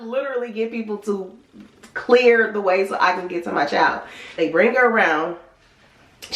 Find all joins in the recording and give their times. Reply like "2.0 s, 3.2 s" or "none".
4.3 s